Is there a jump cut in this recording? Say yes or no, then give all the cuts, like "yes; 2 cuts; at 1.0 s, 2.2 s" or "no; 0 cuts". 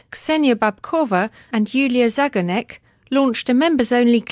no; 0 cuts